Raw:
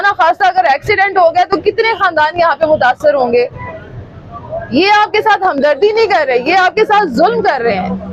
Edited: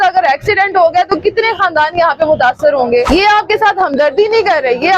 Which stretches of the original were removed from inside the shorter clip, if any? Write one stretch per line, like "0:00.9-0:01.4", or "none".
0:03.5-0:04.7